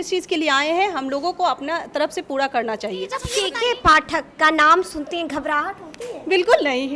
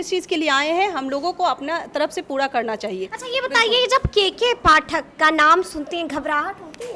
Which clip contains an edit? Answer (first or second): first